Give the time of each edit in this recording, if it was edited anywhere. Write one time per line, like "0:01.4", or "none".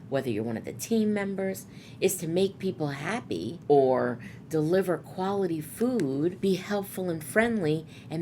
0:03.5
0:06.4